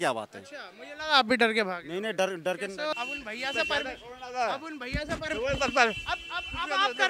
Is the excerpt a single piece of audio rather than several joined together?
no; 1 cut; at 2.9 s

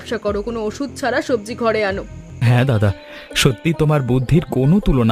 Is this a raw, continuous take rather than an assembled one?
no; 1 cut; at 2.2 s

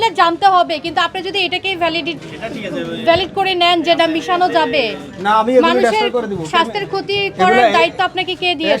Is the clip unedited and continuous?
yes; 0 cuts

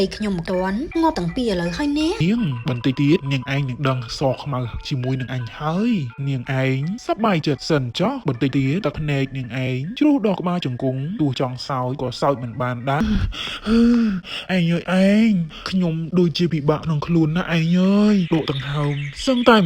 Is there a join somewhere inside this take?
yes; 2 cuts; at 2.2 s, 13.0 s

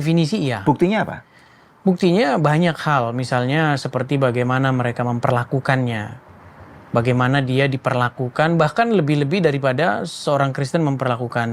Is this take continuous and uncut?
yes; 0 cuts

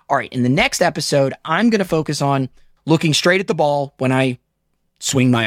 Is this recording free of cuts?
no; 1 cut; at 2.7 s

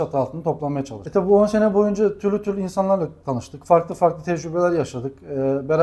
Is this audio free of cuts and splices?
no; 1 cut; at 1.0 s

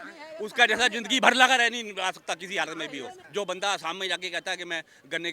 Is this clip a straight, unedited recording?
no; 1 cut; at 3.2 s

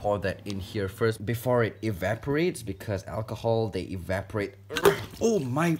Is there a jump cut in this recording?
no; 0 cuts

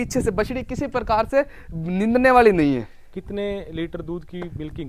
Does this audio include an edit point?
no; 0 cuts

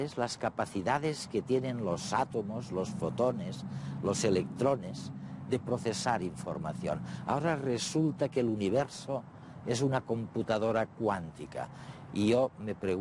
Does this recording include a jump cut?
no; 0 cuts

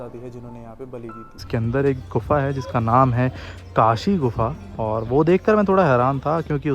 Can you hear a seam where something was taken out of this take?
yes; 1 cut; at 1.4 s

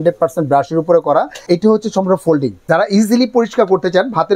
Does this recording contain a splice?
yes; 2 cuts; at 1.4 s, 2.6 s

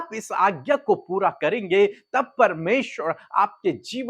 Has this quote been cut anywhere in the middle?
no; 0 cuts

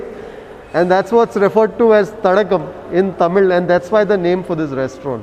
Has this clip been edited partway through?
no; 0 cuts

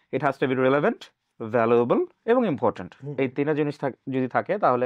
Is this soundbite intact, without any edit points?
yes; 0 cuts

